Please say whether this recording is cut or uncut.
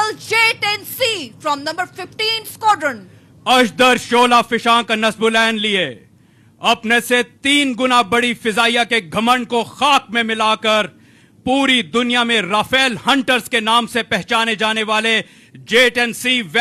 uncut